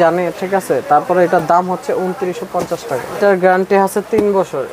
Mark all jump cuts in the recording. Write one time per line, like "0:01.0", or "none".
0:03.2